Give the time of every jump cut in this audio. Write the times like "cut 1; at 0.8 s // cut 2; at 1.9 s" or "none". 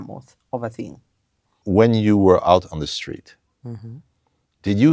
cut 1; at 1.6 s